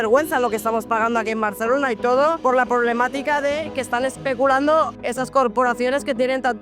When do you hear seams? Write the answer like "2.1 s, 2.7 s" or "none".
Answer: 2.4 s, 5.0 s